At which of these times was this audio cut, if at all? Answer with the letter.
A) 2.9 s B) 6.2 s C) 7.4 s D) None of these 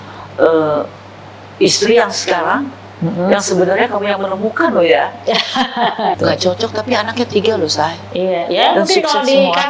B